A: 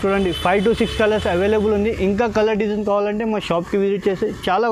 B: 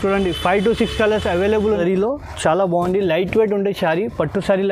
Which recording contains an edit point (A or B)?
B